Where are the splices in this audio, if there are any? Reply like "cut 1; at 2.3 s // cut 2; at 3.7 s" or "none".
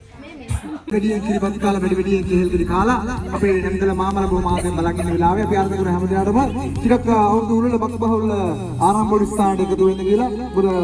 cut 1; at 0.9 s

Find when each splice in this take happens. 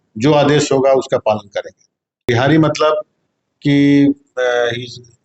cut 1; at 2.2 s

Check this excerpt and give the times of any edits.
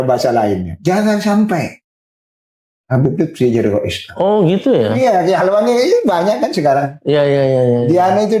none

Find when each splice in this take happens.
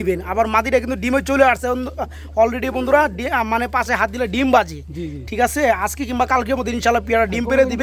none

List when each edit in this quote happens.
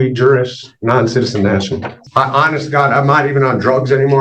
cut 1; at 2.0 s

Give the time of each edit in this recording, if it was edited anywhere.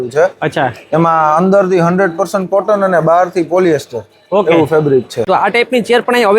cut 1; at 5.3 s

